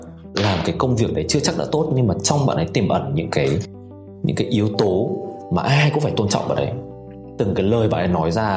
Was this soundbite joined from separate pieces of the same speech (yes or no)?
no